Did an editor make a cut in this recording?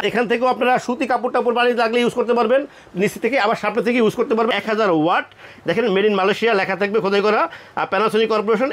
yes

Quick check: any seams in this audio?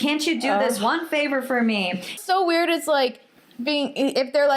yes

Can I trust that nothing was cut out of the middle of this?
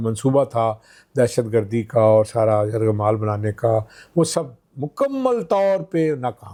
yes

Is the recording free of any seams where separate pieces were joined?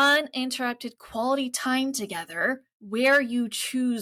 no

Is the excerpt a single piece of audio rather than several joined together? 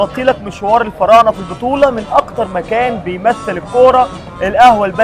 yes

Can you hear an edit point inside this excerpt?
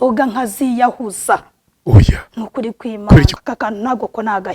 yes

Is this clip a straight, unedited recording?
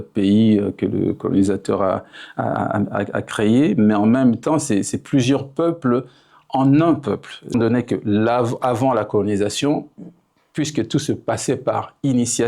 no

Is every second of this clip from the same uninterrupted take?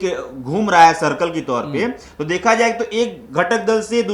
yes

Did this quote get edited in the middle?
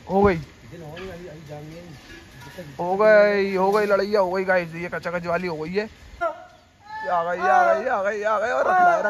yes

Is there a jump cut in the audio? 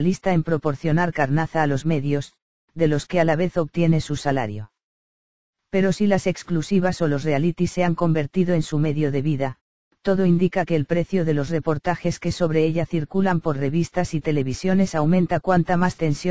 yes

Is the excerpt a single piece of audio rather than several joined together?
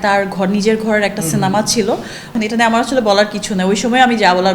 no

